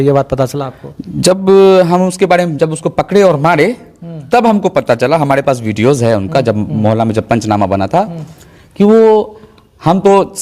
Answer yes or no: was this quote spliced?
no